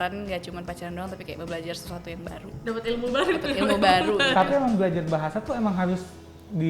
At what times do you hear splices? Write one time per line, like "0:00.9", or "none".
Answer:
none